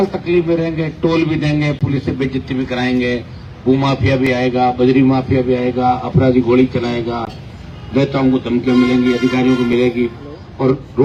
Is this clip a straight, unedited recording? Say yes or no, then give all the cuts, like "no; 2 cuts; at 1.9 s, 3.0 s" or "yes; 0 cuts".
yes; 0 cuts